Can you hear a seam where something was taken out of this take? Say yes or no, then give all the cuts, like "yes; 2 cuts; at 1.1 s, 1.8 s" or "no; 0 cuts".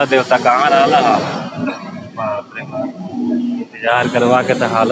no; 0 cuts